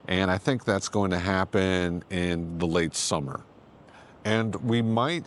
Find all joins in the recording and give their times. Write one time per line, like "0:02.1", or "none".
0:03.7